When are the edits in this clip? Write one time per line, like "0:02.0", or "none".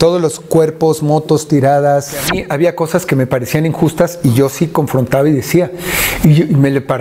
0:02.3